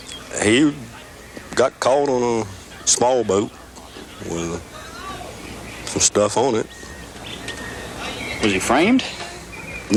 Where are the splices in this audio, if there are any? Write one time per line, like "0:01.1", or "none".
none